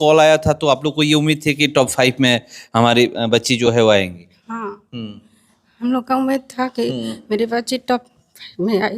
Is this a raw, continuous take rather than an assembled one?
yes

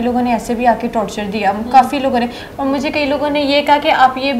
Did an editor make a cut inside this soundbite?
no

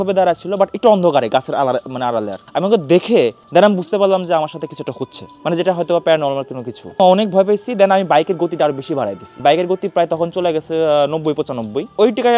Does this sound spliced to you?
no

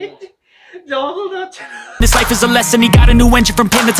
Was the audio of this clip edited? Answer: yes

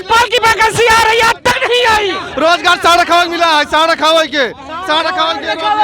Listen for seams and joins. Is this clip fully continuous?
no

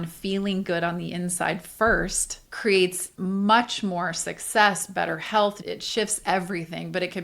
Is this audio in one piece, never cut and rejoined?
no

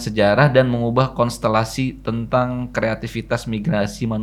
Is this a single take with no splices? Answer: yes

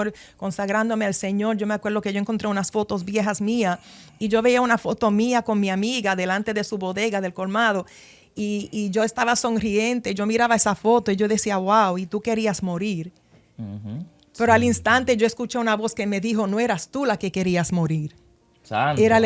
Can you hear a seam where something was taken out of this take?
no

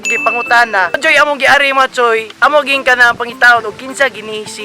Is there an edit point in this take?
yes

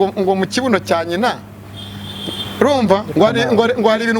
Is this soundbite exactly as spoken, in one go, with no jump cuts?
yes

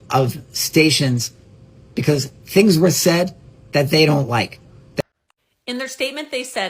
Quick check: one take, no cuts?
no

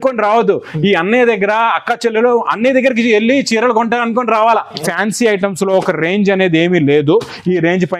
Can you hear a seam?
yes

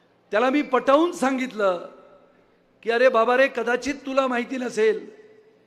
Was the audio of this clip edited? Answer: no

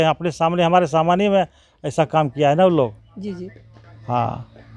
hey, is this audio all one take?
yes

